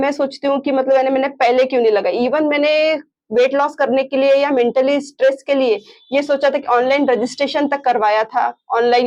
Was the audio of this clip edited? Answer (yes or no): no